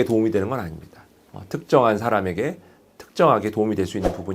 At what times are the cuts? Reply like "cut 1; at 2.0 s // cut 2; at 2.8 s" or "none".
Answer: none